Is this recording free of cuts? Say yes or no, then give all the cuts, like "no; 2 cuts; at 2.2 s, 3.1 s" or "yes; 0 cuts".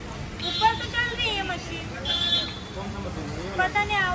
yes; 0 cuts